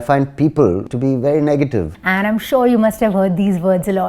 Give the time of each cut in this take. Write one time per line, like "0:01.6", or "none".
0:00.9
0:01.9